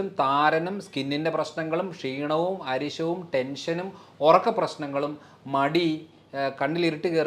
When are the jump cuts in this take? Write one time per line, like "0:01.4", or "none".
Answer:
none

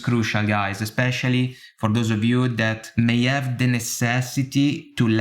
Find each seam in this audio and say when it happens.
0:02.8

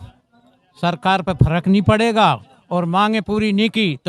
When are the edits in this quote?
none

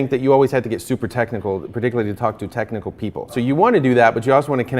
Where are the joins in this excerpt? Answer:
0:03.4

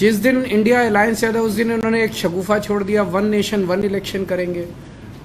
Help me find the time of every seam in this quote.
none

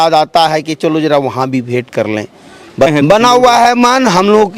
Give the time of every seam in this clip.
0:02.9

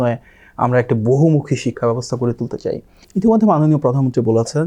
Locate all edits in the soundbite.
0:02.9

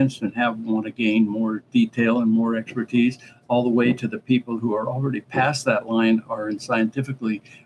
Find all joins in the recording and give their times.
none

